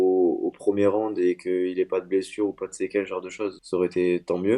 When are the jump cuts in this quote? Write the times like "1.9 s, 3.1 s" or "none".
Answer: 3.6 s